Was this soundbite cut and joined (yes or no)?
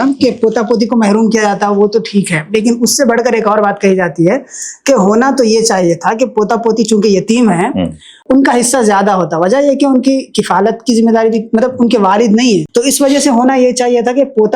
yes